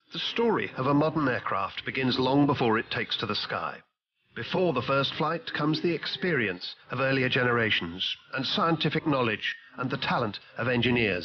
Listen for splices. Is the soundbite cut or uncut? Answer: cut